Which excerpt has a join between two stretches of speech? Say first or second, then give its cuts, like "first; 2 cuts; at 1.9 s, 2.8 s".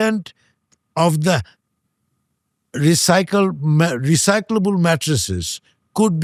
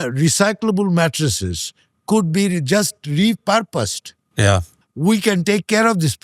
second; 1 cut; at 4.8 s